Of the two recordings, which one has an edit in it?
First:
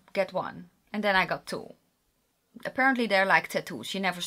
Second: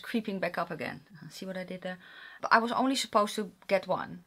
second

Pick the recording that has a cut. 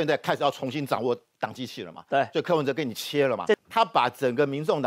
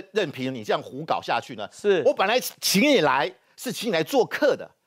first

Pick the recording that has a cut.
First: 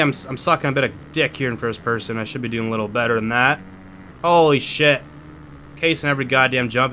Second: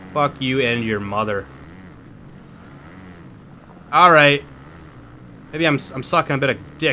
second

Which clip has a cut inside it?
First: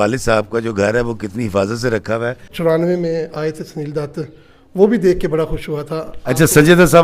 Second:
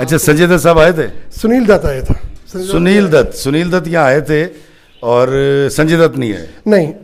first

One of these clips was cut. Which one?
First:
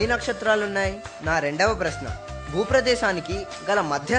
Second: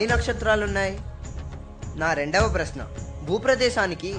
first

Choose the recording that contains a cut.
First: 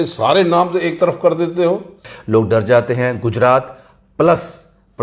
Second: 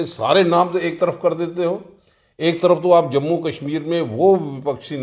first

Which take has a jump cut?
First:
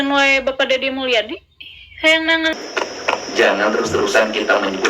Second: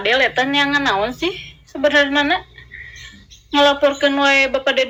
first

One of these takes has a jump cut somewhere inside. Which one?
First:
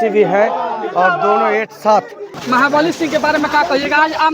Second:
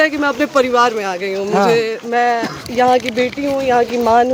first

